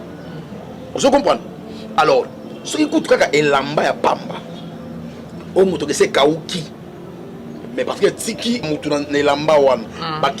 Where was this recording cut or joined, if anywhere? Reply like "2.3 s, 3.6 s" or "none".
8.7 s